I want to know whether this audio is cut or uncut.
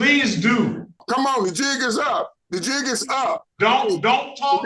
cut